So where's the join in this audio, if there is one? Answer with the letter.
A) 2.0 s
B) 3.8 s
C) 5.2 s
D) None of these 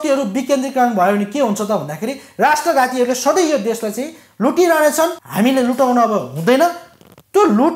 C